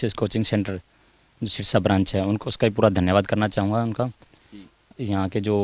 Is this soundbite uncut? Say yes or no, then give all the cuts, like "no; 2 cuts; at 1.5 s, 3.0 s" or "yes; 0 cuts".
yes; 0 cuts